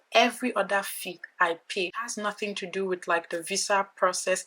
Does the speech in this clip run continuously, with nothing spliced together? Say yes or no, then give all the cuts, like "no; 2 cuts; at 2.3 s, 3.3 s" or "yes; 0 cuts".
no; 1 cut; at 2.0 s